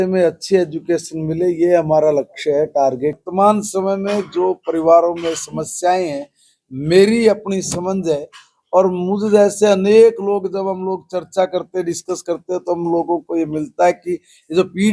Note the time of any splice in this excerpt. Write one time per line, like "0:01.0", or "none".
0:03.2